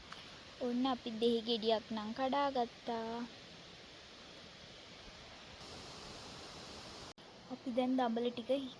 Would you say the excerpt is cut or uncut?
cut